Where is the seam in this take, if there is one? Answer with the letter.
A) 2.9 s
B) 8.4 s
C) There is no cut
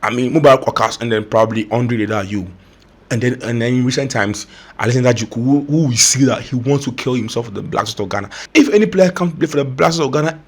B